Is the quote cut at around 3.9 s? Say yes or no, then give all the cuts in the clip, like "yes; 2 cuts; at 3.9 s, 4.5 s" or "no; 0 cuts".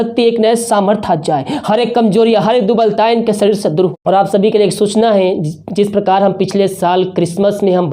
yes; 1 cut; at 3.9 s